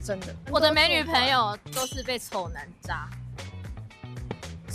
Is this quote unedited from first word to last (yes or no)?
yes